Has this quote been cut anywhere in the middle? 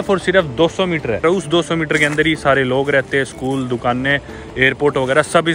yes; 1 cut; at 1.2 s

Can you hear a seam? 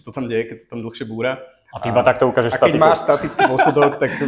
no; 0 cuts

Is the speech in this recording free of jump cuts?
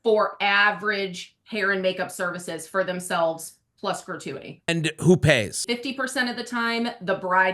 no; 2 cuts; at 4.7 s, 5.6 s

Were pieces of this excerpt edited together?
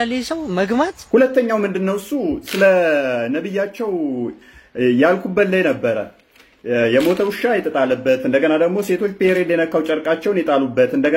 yes; 1 cut; at 1.0 s

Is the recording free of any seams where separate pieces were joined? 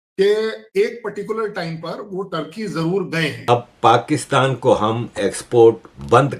no; 1 cut; at 3.5 s

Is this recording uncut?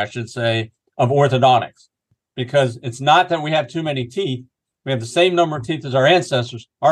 yes; 0 cuts

